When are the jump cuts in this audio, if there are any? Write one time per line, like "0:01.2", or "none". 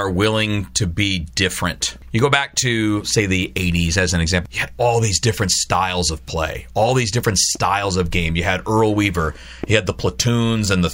0:01.9
0:04.4